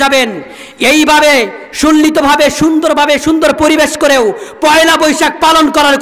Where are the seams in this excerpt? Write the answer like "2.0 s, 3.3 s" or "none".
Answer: none